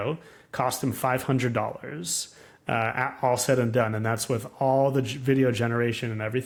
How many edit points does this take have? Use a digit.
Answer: 0